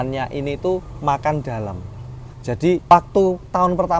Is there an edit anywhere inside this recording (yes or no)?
yes